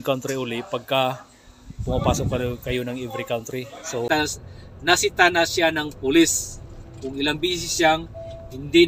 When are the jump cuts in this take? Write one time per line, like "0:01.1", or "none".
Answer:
0:04.1